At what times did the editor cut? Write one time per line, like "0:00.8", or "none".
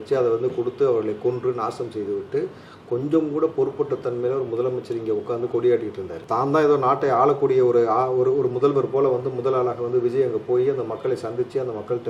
none